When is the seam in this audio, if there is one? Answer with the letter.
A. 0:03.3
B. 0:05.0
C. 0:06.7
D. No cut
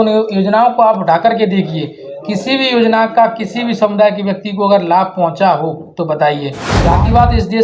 C